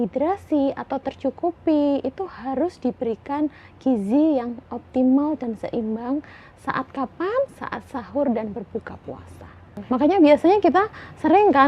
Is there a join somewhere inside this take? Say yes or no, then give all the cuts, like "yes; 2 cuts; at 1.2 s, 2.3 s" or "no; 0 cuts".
yes; 1 cut; at 9.8 s